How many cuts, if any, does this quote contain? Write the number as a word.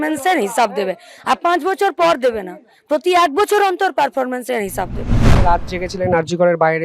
one